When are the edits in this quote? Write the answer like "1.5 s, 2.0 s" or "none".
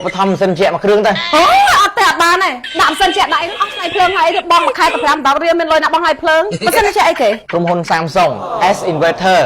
6.6 s, 7.4 s, 8.5 s